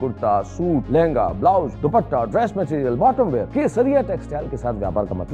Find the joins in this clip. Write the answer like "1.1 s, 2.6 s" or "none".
0.8 s, 1.7 s, 3.5 s